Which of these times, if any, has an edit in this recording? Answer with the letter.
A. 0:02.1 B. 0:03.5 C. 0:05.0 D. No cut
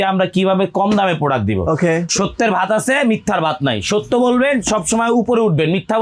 A